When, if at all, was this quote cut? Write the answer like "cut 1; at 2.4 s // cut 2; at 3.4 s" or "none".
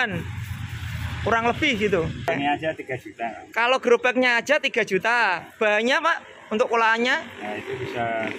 cut 1; at 2.3 s